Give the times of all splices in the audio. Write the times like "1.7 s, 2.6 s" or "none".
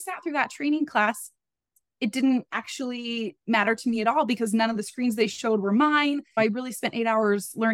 6.3 s